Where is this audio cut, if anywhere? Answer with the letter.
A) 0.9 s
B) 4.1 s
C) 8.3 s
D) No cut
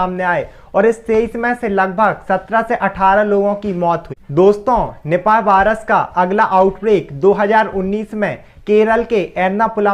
D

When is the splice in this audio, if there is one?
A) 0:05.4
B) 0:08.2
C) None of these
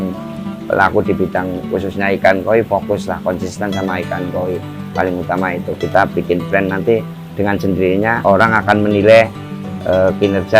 B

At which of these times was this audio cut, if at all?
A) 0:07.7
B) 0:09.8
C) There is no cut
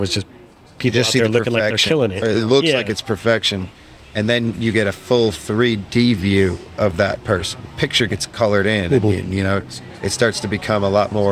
A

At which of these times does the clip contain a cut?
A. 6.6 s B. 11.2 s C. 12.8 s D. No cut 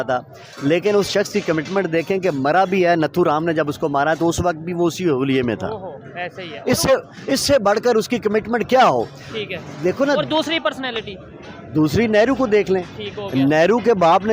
D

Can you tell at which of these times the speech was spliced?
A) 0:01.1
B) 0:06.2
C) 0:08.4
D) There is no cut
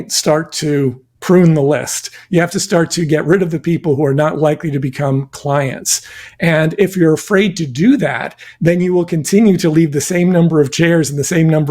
A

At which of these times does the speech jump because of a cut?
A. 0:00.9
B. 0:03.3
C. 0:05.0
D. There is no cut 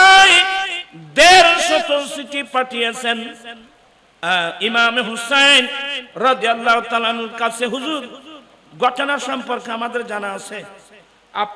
D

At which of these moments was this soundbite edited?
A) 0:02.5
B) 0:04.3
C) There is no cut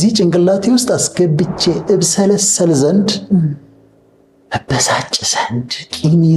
C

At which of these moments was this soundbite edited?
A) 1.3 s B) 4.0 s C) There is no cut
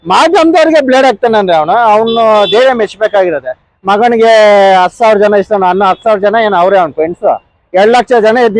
C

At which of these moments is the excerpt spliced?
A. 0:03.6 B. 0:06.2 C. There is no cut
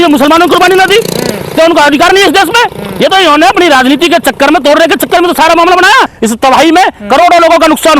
B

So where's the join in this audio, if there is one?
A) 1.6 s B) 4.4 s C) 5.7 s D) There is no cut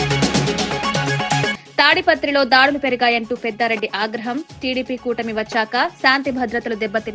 A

